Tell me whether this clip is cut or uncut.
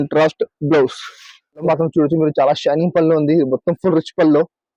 cut